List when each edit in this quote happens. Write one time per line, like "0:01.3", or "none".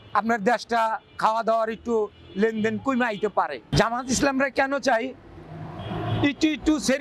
0:03.7